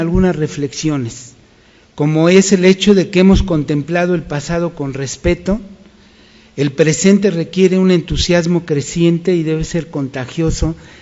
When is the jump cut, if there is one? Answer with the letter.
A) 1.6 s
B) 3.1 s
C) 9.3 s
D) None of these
C